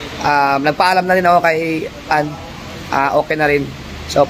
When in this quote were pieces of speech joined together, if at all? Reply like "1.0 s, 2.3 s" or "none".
none